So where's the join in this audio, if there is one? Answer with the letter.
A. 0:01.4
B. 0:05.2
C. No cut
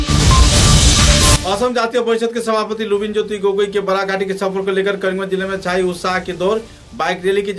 A